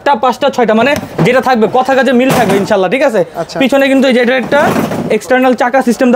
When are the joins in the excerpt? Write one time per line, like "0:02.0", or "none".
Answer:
none